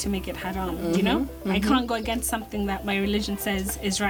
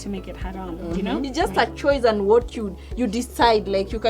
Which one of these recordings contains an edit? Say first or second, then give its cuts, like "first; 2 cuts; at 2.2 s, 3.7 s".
second; 1 cut; at 1.3 s